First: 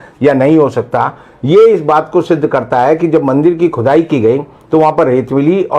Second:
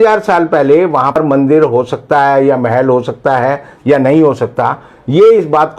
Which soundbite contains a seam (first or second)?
second